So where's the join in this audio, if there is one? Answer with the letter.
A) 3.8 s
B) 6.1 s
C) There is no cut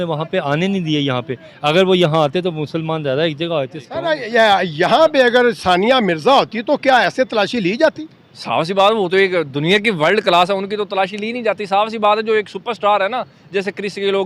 A